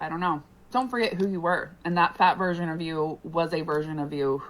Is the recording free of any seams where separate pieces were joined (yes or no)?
yes